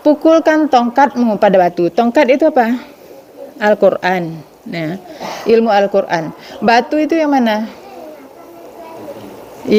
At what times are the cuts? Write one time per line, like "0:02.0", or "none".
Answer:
none